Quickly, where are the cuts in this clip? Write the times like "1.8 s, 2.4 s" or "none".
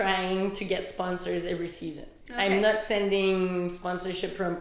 2.0 s